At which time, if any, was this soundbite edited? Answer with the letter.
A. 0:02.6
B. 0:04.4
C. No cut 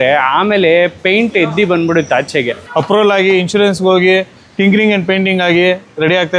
A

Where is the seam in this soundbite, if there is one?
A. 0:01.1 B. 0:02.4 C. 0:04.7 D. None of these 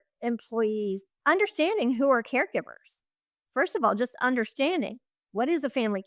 A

